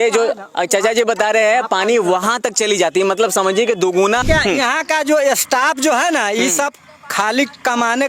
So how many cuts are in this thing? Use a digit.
1